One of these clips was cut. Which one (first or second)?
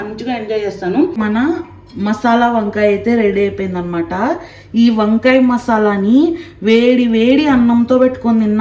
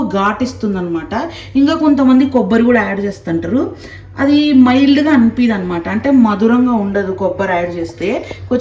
first